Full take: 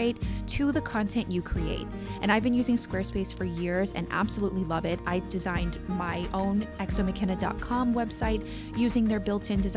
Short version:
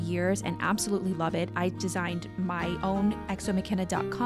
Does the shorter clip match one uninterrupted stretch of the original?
yes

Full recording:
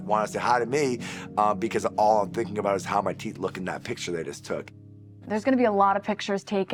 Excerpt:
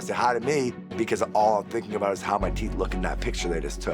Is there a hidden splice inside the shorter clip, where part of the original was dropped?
yes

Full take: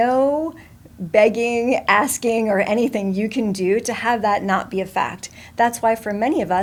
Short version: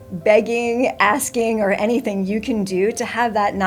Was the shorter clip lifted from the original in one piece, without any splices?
yes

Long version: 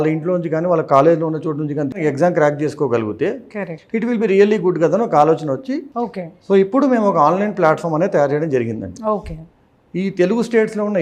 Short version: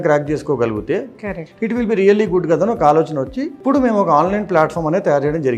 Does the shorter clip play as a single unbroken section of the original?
no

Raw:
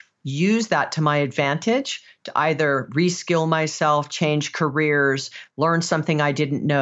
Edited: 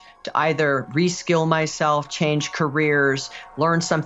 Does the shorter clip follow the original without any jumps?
yes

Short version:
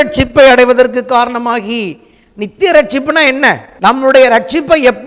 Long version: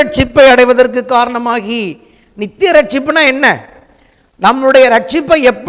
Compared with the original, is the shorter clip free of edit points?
no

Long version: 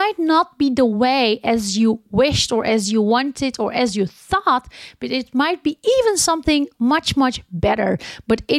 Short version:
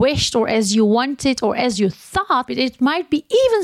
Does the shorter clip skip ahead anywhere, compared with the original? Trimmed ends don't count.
yes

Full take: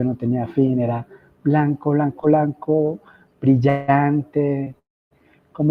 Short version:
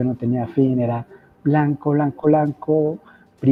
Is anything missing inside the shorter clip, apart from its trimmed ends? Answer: no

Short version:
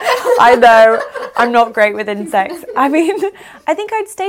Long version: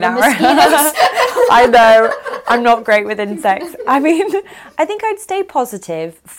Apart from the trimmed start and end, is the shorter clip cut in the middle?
no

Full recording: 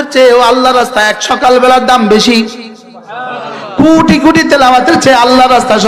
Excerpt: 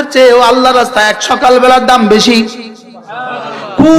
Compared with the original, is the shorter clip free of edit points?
yes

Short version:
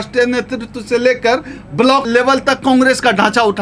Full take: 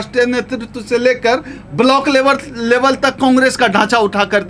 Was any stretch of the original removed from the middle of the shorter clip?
yes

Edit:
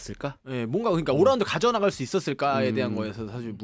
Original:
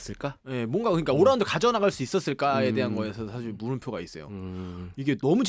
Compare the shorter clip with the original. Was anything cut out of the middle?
no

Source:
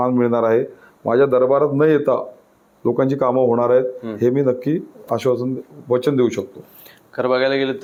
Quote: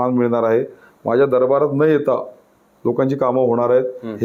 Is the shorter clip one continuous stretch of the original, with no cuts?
yes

